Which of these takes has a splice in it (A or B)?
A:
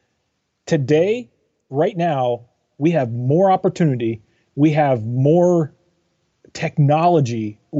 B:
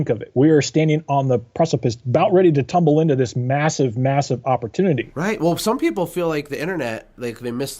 B